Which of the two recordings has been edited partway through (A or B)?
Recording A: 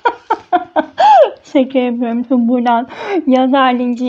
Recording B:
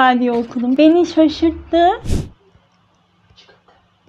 B